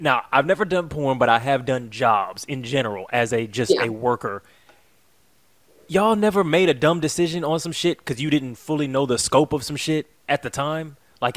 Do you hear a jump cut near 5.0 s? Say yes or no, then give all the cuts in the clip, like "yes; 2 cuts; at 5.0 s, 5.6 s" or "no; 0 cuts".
no; 0 cuts